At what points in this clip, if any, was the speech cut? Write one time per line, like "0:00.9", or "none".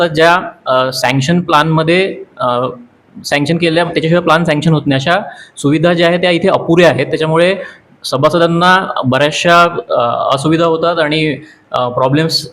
none